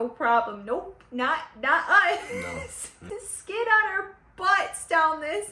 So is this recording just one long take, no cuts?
no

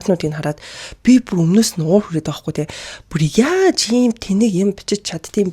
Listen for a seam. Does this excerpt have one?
no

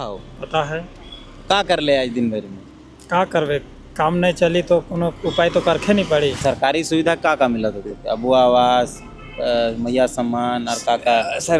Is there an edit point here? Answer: yes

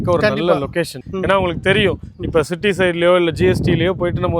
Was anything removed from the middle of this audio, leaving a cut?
no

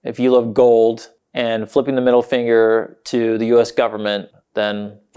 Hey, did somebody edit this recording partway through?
no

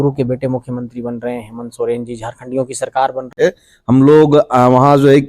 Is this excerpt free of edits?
no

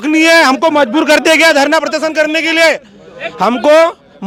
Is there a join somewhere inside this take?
no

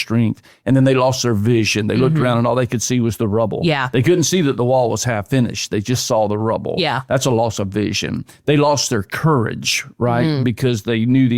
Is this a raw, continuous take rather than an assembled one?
yes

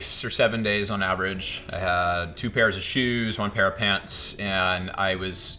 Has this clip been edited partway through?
no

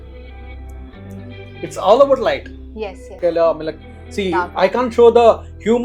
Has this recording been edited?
yes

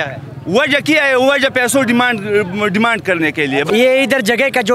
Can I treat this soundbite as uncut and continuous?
no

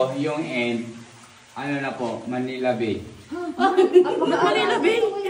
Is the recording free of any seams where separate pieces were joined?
yes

